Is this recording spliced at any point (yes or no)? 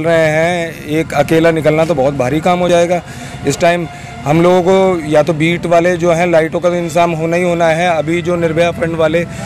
no